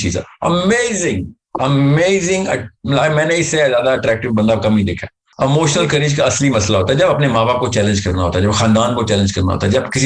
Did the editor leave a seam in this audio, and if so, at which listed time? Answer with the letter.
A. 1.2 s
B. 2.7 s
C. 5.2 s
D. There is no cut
C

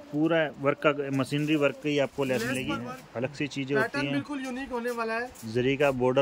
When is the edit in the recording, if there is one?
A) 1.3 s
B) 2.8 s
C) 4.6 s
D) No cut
B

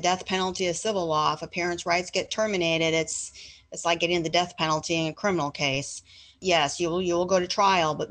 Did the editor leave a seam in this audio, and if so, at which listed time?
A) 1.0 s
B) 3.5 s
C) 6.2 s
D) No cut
C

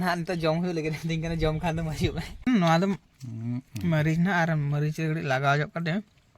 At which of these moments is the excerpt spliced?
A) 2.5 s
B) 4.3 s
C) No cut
A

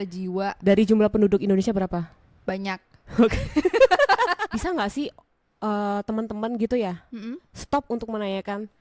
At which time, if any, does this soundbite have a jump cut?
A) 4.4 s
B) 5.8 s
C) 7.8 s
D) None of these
A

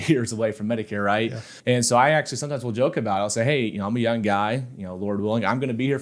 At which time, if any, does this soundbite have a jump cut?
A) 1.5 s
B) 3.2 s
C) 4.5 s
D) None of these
A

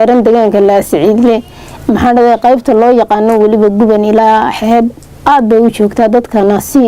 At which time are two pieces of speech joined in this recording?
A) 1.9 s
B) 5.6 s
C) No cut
C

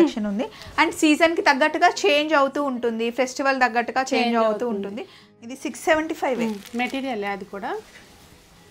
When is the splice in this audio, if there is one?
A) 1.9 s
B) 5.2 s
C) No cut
B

